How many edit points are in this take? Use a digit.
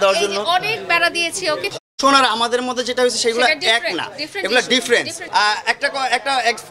2